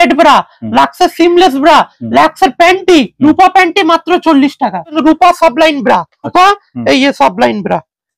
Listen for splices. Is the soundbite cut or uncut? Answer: cut